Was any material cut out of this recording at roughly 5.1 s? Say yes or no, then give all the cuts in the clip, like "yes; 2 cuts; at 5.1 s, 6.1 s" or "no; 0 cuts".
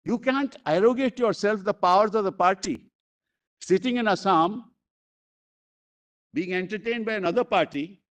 no; 0 cuts